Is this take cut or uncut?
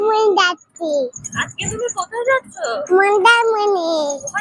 uncut